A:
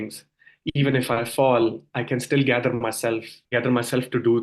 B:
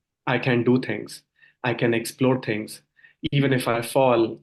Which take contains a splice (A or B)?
A